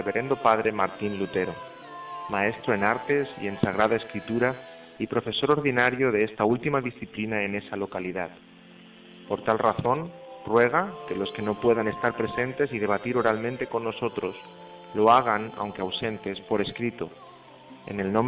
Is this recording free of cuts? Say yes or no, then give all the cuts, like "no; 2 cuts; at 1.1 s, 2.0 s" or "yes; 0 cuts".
no; 1 cut; at 2.6 s